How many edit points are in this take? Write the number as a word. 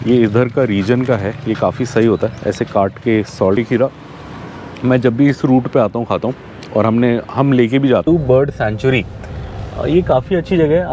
two